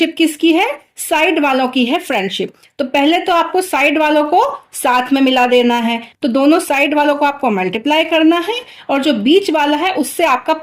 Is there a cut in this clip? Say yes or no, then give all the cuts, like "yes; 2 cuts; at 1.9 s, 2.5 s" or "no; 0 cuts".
no; 0 cuts